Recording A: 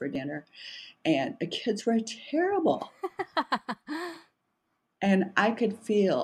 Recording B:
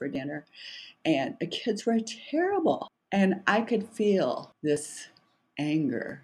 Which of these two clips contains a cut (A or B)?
B